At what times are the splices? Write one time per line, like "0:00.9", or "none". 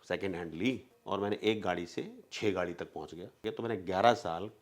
0:00.9
0:03.4